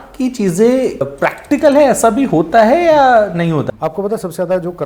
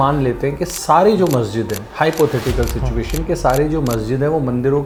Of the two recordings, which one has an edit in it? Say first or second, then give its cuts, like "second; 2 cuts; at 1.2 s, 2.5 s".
first; 2 cuts; at 1.0 s, 3.7 s